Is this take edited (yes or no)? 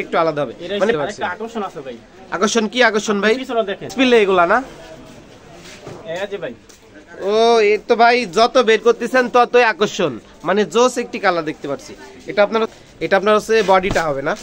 yes